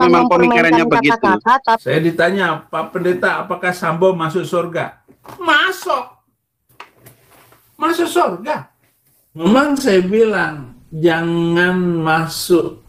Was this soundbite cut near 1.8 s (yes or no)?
yes